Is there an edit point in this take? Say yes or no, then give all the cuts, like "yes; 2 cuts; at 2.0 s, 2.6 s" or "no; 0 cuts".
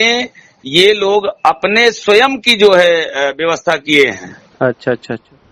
no; 0 cuts